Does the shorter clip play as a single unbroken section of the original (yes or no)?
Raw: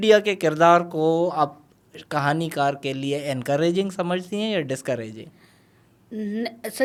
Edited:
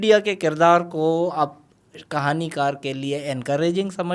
yes